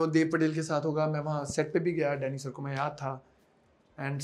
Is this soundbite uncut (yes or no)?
yes